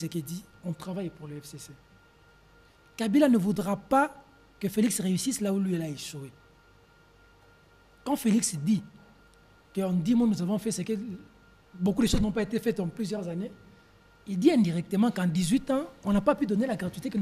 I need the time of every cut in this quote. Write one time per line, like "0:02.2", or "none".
none